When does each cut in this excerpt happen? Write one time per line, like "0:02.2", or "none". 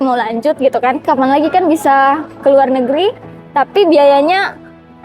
0:01.1